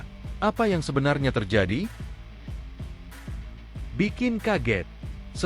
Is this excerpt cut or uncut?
cut